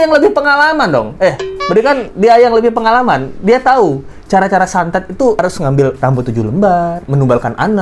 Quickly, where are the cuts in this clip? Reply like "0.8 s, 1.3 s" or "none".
none